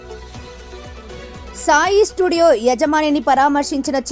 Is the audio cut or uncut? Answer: uncut